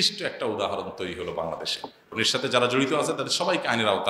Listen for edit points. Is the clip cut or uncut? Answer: cut